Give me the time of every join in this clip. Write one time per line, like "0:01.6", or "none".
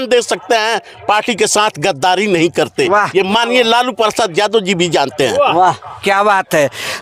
none